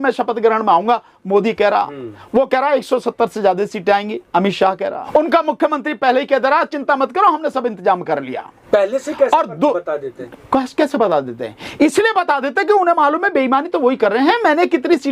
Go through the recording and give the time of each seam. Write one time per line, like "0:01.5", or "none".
0:05.0
0:08.6